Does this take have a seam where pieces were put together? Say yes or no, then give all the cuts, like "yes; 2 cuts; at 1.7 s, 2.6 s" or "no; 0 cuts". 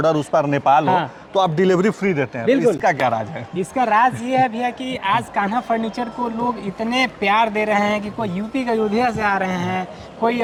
no; 0 cuts